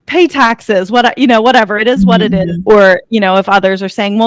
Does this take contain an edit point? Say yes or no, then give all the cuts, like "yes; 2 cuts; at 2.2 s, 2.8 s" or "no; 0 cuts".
yes; 1 cut; at 2.6 s